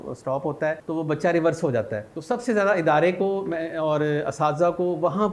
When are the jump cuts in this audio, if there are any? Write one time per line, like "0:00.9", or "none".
0:00.8
0:02.1